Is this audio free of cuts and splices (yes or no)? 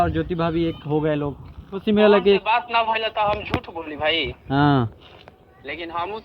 no